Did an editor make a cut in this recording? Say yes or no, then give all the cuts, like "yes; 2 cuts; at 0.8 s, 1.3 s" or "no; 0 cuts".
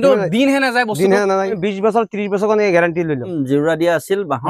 yes; 2 cuts; at 1.6 s, 3.3 s